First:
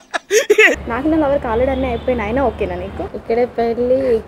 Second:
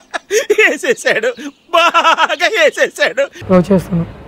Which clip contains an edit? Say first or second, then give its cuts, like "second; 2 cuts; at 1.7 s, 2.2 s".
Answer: first; 2 cuts; at 0.8 s, 3.1 s